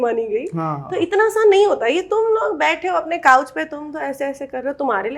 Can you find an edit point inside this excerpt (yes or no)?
no